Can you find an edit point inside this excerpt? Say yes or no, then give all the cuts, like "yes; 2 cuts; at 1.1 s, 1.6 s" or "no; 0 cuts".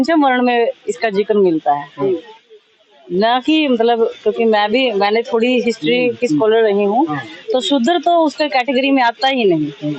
no; 0 cuts